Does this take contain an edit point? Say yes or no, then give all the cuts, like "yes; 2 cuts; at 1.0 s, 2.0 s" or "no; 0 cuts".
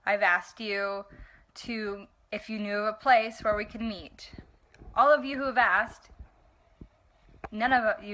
no; 0 cuts